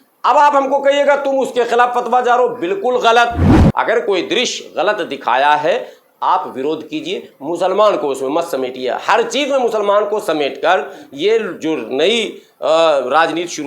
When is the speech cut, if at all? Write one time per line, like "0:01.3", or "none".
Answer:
0:03.6